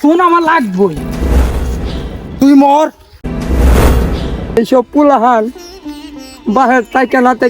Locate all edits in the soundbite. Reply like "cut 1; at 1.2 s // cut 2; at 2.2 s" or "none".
cut 1; at 4.6 s